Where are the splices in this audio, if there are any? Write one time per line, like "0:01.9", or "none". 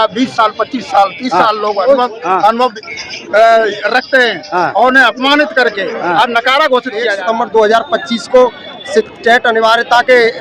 0:07.2